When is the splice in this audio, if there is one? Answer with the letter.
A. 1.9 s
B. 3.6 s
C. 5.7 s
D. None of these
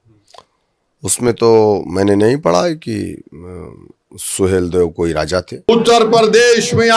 C